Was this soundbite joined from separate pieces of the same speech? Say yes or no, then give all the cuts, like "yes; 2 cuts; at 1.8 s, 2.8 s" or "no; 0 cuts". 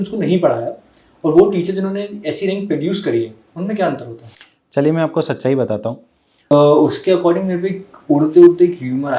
yes; 1 cut; at 6.5 s